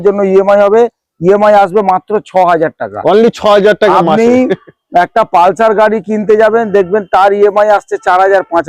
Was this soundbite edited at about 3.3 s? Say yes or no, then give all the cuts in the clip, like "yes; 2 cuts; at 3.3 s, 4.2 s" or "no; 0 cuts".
no; 0 cuts